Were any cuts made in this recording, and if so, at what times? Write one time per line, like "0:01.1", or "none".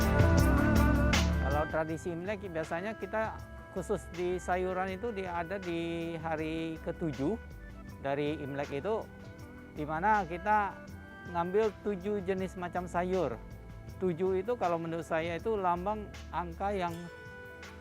0:01.4